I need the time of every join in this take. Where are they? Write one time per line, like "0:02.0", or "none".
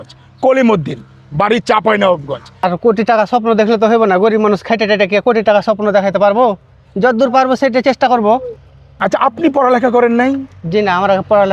0:02.5
0:08.9